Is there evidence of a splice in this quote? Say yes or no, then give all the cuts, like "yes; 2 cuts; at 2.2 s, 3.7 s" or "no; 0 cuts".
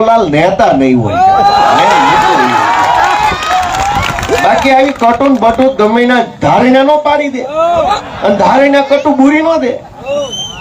no; 0 cuts